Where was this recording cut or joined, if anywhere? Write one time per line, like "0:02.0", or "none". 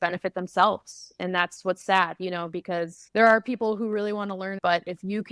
0:03.0
0:04.5